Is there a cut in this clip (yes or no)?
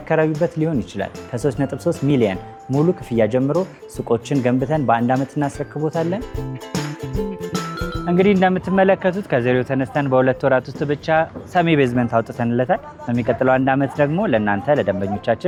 no